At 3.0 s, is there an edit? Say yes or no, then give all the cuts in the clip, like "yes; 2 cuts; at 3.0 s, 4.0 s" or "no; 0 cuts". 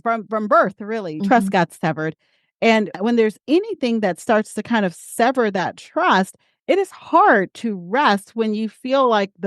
yes; 1 cut; at 3.0 s